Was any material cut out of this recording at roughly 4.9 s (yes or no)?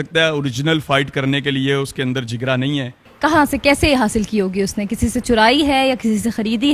no